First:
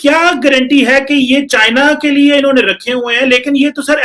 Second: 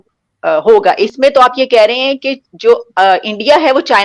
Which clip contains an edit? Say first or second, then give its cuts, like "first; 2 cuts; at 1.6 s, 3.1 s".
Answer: second; 1 cut; at 1.1 s